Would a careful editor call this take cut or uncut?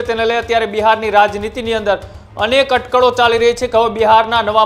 uncut